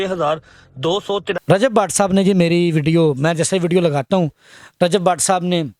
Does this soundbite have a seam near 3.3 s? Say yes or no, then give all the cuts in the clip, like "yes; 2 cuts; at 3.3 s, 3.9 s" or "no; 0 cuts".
no; 1 cut; at 1.3 s